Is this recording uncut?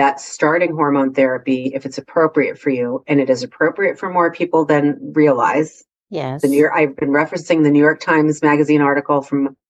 yes; 0 cuts

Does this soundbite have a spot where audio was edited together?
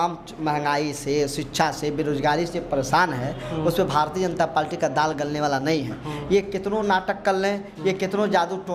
no; 0 cuts

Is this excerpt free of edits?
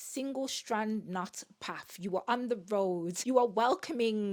no; 1 cut; at 3.1 s

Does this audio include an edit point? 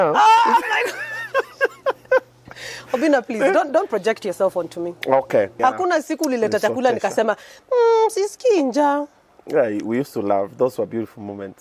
yes; 1 cut; at 5.5 s

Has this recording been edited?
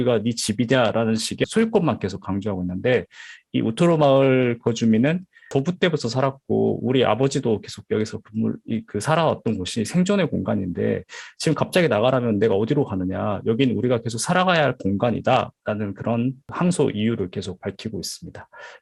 yes; 3 cuts; at 1.4 s, 5.5 s, 16.5 s

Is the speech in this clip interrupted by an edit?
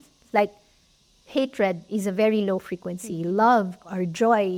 no; 0 cuts

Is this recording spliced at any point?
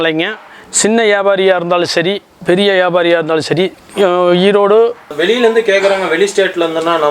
yes; 1 cut; at 5.1 s

